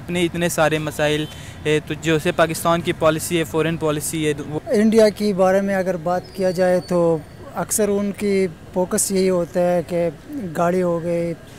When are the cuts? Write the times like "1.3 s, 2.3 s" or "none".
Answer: 4.5 s